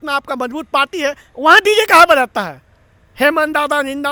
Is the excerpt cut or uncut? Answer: uncut